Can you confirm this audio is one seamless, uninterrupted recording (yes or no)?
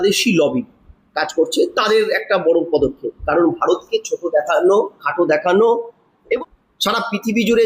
no